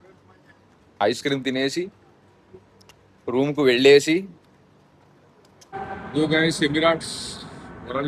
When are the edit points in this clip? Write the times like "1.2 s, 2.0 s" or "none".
5.6 s